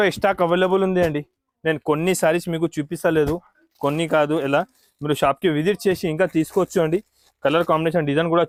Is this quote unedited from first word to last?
yes; 0 cuts

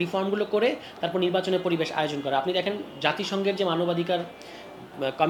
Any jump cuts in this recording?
no; 0 cuts

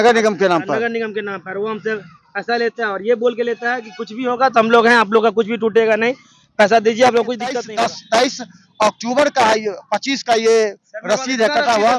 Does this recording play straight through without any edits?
no; 1 cut; at 7.6 s

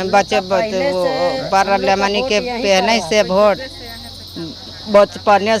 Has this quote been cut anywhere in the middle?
no; 0 cuts

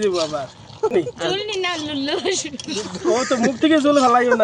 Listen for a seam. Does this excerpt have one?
yes; 1 cut; at 0.9 s

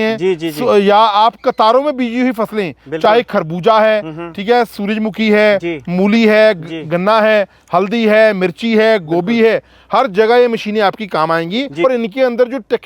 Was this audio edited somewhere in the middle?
yes; 1 cut; at 11.8 s

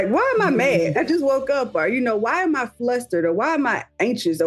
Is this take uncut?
no; 1 cut; at 0.9 s

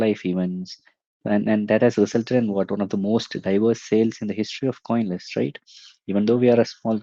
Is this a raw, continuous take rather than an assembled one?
yes; 0 cuts

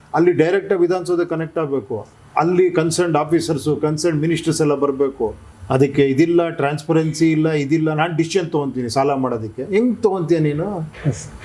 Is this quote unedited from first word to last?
no; 1 cut; at 5.5 s

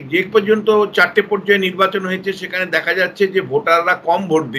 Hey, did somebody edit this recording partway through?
no; 0 cuts

